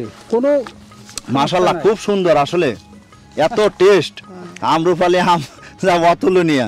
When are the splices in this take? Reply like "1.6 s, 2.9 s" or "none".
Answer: none